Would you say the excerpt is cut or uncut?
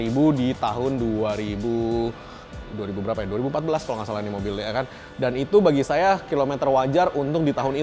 uncut